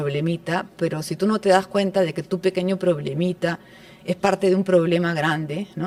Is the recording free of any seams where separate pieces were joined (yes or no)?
yes